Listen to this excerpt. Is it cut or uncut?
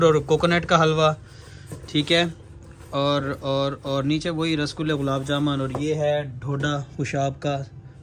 uncut